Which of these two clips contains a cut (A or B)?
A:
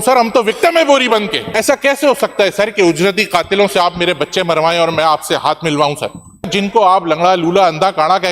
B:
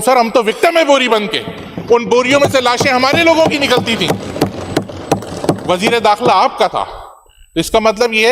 A